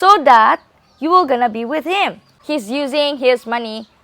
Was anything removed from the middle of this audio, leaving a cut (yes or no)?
yes